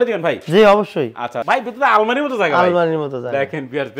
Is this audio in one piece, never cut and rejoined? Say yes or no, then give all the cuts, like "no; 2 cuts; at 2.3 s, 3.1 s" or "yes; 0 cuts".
no; 1 cut; at 1.4 s